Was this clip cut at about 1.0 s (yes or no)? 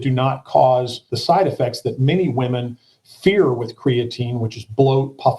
yes